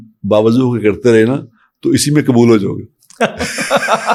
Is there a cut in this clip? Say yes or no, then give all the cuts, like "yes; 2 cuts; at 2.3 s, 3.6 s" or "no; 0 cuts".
no; 0 cuts